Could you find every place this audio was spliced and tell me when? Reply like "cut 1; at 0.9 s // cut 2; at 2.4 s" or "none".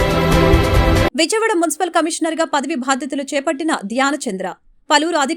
cut 1; at 1.1 s